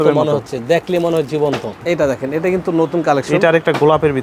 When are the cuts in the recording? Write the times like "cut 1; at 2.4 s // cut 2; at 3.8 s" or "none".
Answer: cut 1; at 1.8 s